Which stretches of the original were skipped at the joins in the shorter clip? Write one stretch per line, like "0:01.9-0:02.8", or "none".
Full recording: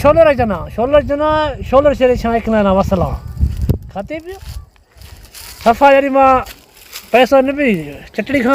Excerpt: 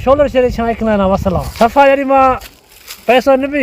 0:03.1-0:05.5